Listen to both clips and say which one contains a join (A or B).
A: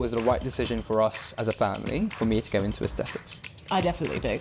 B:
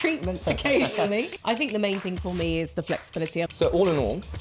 B